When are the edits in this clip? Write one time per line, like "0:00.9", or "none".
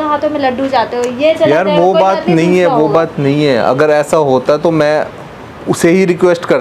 none

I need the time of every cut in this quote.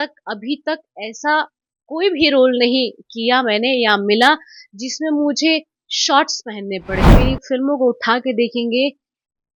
0:07.1

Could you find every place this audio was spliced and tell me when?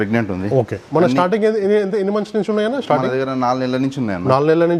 none

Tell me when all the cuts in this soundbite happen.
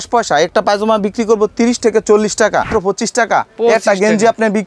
0:02.7

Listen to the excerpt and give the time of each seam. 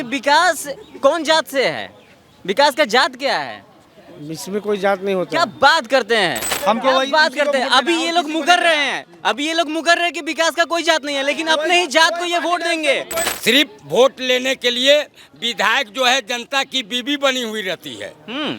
0:06.5
0:13.3

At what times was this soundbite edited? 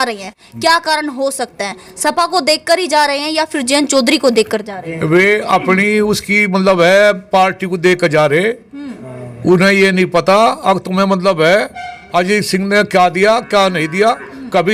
none

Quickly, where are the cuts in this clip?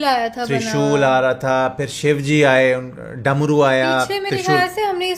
0:01.8

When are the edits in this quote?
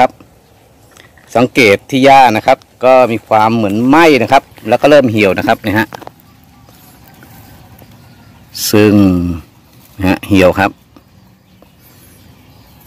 none

